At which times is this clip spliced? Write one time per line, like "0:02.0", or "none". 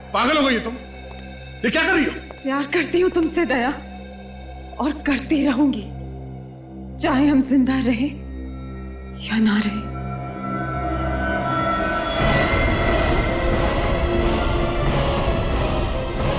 none